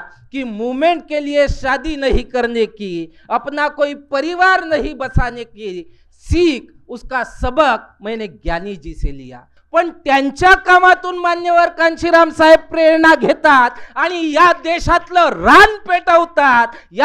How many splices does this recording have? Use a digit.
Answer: 1